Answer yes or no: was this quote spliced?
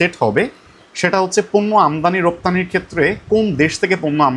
no